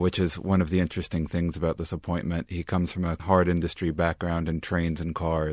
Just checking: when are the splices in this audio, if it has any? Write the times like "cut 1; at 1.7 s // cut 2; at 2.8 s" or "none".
cut 1; at 3.2 s